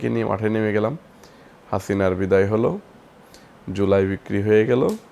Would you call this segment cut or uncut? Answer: uncut